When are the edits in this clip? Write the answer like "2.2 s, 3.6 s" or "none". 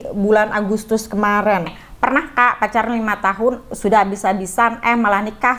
1.8 s

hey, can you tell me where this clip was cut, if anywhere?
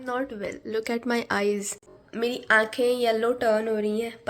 2.0 s

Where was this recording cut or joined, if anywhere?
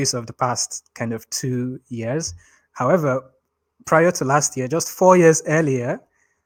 none

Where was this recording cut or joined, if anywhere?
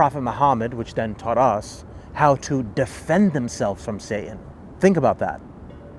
none

